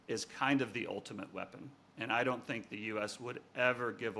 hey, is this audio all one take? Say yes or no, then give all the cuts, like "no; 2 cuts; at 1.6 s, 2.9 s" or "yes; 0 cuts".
yes; 0 cuts